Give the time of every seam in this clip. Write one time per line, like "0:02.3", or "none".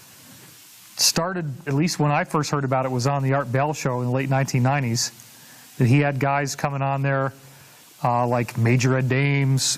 0:04.2